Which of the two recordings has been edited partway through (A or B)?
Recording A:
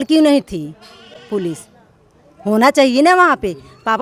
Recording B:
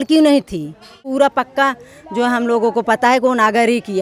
B